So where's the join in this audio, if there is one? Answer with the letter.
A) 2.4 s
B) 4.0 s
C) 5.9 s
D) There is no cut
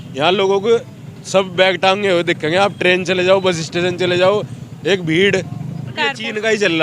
C